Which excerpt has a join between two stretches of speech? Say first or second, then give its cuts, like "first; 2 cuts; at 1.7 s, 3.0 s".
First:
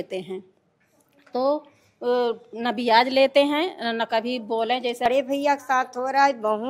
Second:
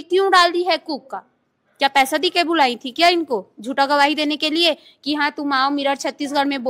first; 1 cut; at 5.0 s